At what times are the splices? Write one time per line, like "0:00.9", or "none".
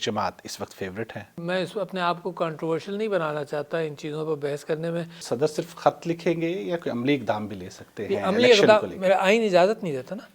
0:01.3
0:05.2